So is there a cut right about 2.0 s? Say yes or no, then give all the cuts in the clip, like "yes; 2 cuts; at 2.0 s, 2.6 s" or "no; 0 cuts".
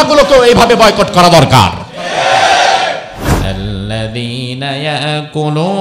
no; 1 cut; at 3.4 s